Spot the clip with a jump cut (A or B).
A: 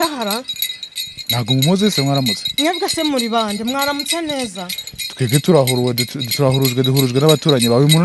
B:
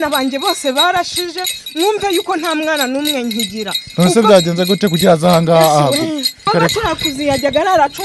B